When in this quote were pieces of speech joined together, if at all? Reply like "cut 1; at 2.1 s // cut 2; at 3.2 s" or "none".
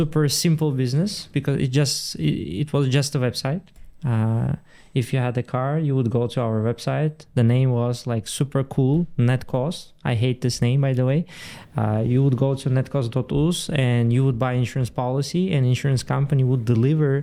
none